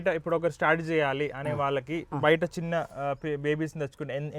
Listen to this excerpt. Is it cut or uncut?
uncut